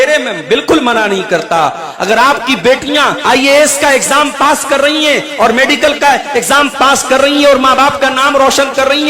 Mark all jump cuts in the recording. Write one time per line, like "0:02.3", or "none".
0:03.2